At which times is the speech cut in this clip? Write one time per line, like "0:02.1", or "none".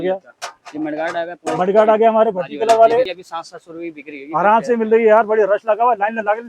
0:03.2